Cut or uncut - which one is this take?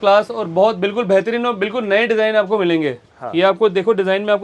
uncut